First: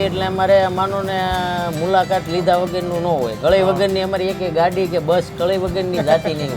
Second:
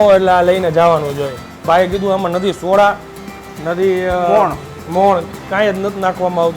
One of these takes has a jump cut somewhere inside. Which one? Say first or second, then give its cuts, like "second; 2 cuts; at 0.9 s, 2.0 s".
second; 1 cut; at 1.5 s